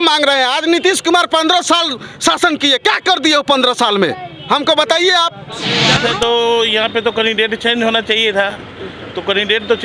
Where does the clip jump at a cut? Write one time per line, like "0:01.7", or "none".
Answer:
0:05.9